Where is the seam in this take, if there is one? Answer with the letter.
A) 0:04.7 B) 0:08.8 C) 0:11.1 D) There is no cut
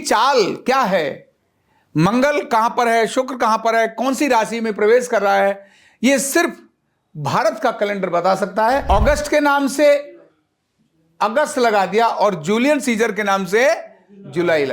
B